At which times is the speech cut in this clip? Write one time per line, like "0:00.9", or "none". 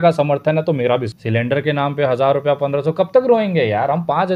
0:01.1